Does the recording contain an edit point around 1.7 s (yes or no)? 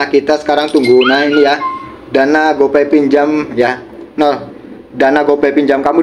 no